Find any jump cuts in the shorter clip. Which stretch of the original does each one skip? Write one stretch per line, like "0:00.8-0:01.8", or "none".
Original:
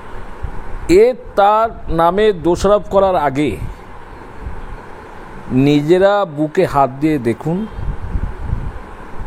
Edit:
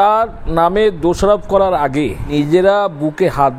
0:03.7-0:05.7